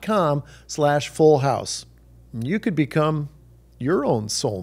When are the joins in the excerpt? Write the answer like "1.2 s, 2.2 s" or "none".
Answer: none